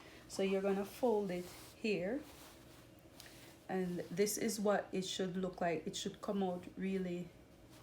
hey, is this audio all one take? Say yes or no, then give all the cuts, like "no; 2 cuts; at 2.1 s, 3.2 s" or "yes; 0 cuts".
yes; 0 cuts